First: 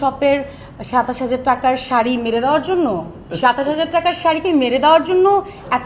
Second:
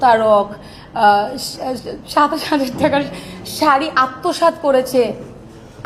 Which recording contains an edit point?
first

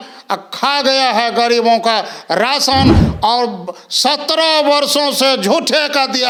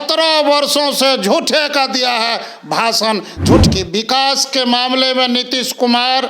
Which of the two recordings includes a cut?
second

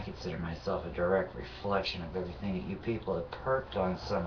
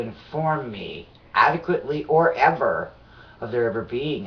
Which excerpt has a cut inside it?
first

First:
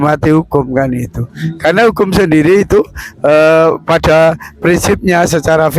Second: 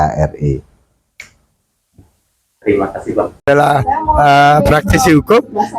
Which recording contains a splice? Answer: second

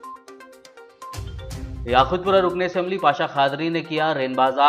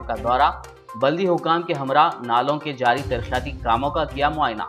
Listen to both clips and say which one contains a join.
first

